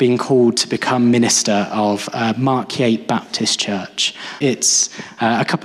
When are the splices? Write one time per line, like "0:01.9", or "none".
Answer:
0:04.4